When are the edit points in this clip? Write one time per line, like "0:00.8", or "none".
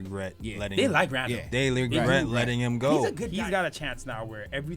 0:03.2